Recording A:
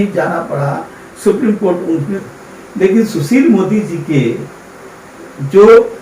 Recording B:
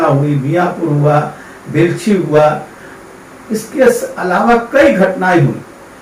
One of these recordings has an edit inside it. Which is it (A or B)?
A